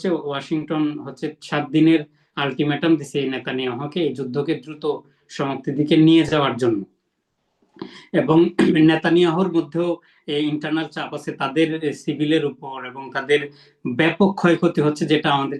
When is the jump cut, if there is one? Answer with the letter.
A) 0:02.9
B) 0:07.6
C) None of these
C